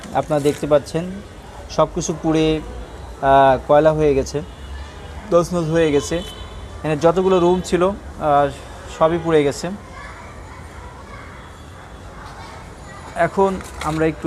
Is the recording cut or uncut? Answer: uncut